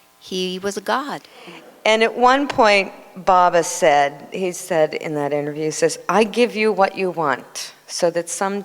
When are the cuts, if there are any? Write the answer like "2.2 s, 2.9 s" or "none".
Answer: 1.3 s